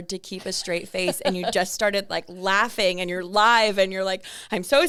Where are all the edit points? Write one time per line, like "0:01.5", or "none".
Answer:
none